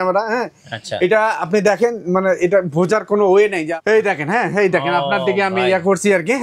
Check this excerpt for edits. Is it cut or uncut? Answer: cut